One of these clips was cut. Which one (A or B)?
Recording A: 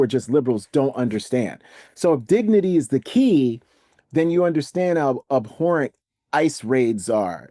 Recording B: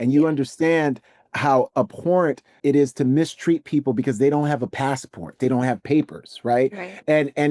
B